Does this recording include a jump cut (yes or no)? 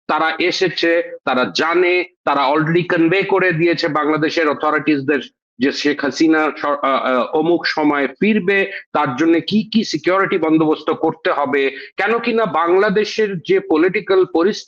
no